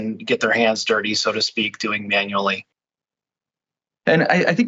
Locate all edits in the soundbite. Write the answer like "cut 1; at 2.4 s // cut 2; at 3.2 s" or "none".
none